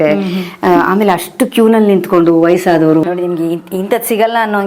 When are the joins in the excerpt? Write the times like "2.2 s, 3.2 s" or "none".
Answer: 3.0 s